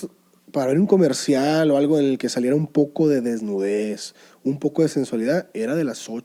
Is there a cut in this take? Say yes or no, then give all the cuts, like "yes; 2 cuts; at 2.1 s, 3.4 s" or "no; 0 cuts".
no; 0 cuts